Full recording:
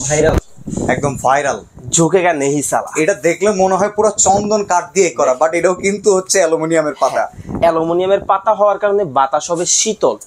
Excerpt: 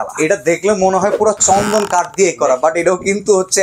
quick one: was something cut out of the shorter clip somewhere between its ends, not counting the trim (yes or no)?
no